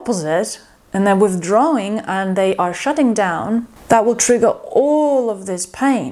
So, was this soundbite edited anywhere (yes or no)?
yes